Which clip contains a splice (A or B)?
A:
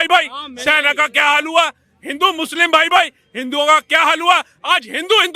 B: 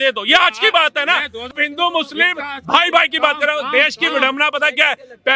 B